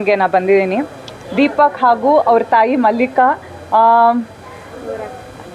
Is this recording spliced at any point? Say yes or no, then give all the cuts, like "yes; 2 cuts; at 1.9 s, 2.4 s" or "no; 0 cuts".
no; 0 cuts